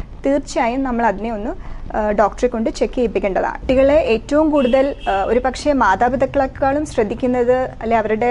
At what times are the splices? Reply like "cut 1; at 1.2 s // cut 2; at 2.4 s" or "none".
cut 1; at 3.6 s